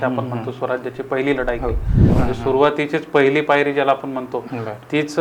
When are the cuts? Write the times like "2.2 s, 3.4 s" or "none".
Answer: 2.1 s